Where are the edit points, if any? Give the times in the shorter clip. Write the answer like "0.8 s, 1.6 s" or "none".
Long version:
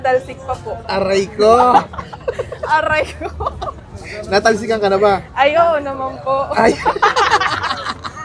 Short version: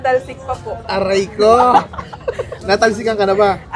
2.5 s